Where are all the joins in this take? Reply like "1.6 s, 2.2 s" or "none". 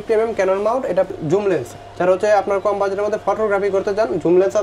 1.1 s